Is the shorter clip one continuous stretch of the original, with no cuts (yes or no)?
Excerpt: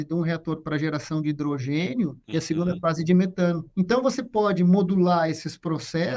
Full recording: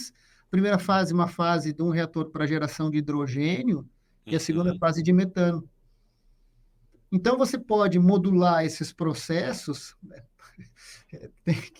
no